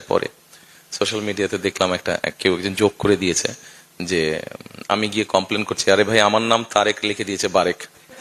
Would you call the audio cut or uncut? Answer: uncut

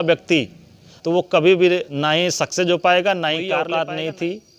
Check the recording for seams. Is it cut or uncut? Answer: cut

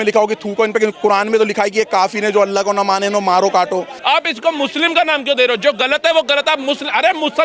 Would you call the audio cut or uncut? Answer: cut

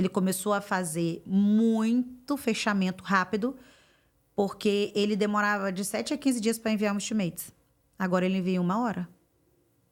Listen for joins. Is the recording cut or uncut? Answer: uncut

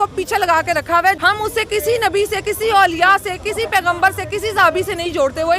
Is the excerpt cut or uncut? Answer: cut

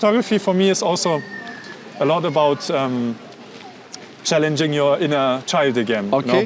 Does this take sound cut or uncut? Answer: uncut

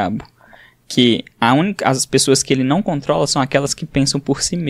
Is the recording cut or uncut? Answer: uncut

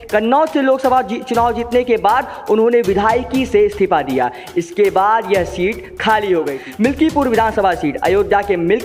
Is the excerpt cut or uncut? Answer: cut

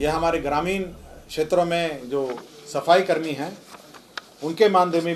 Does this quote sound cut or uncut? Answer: uncut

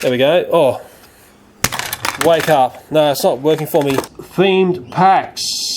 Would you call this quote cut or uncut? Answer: cut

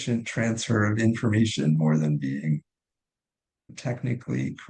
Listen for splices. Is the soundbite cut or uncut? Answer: cut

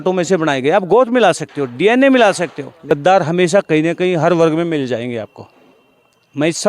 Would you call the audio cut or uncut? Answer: cut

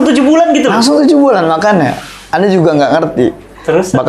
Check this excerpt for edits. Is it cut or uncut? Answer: uncut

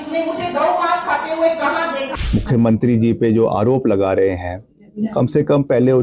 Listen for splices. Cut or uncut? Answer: cut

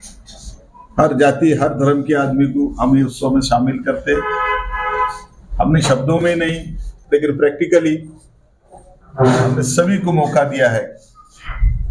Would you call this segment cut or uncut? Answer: uncut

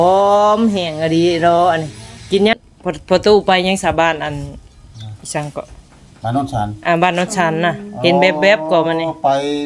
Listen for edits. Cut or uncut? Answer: cut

